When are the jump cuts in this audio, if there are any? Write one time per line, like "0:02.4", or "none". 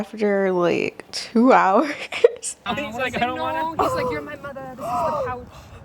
0:02.7